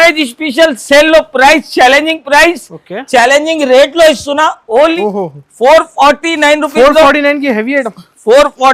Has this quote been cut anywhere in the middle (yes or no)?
yes